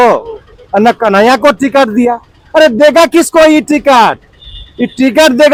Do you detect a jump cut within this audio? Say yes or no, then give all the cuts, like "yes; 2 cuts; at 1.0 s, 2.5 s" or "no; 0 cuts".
no; 0 cuts